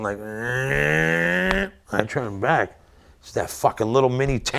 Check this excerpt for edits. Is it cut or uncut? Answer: uncut